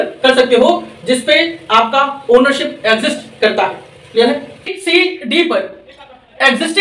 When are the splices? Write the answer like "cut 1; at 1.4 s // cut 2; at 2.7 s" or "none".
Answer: cut 1; at 4.8 s